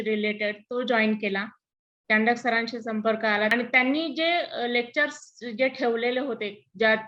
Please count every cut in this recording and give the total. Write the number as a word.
one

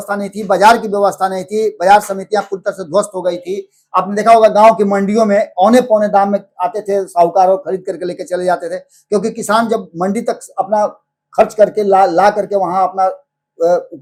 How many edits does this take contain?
zero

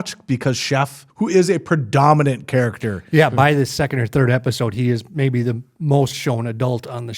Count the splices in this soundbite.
one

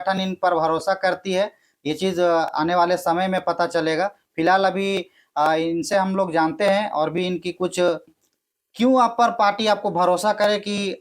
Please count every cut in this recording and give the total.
one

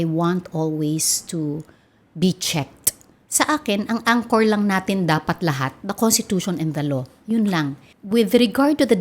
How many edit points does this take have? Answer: two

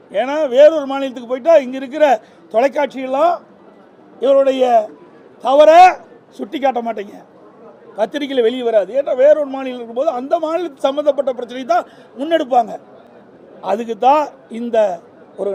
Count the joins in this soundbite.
zero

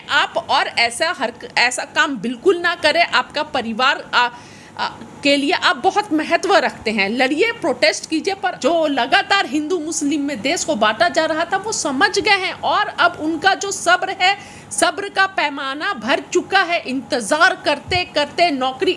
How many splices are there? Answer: one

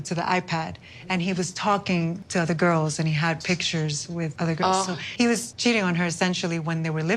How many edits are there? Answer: zero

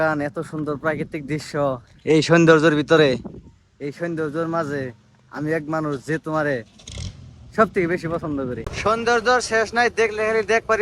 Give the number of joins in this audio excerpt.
one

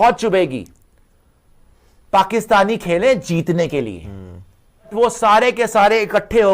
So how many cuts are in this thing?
one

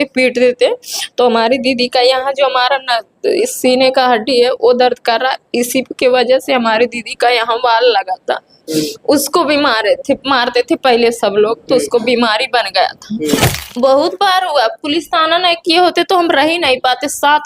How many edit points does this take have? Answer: one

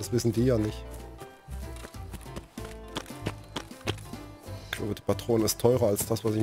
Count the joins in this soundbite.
zero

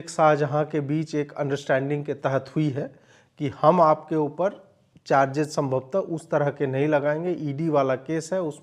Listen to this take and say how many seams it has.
zero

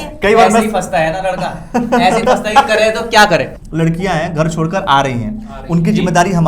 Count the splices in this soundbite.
one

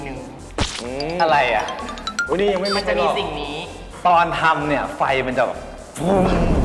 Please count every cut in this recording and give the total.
one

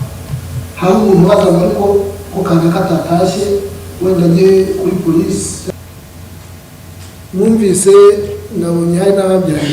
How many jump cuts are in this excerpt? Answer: one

